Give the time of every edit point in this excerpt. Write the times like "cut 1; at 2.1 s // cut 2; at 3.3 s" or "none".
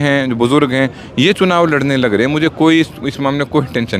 none